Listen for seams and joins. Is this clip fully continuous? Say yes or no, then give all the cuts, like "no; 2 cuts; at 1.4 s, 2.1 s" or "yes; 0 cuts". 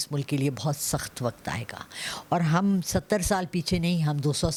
yes; 0 cuts